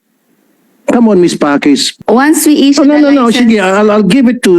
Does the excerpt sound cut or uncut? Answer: cut